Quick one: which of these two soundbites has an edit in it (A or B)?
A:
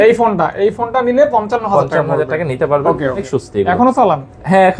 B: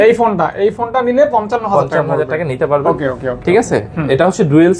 A